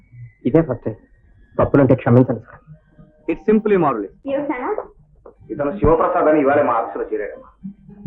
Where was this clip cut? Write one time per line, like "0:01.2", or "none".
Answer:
0:04.2